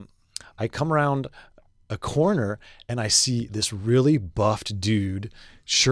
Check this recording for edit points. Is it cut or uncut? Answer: uncut